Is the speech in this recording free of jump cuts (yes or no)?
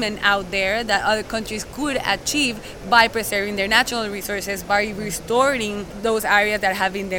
no